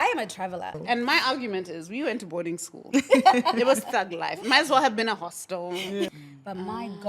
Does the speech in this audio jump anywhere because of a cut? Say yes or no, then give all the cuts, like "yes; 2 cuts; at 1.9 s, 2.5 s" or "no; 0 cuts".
yes; 2 cuts; at 0.8 s, 6.1 s